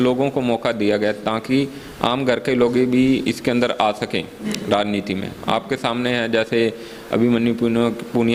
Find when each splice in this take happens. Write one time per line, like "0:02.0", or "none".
none